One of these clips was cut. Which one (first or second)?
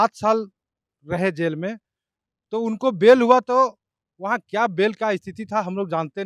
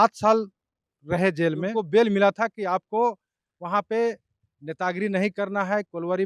second